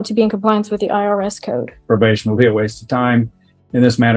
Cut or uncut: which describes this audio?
cut